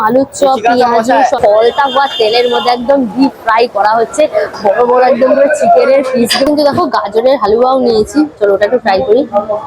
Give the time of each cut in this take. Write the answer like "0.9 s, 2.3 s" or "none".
1.4 s, 6.5 s